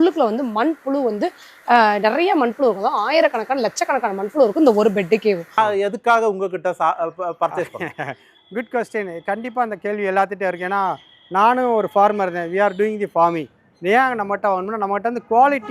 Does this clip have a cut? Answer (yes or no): yes